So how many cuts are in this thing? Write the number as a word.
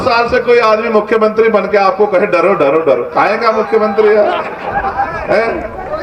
zero